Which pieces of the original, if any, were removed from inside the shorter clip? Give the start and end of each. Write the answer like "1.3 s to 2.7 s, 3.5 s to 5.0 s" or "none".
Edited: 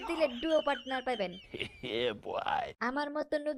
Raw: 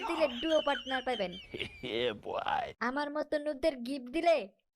none